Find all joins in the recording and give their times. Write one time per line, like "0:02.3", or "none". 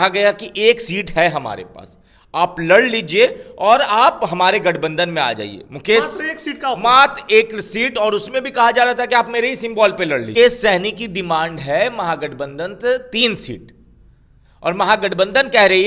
0:10.3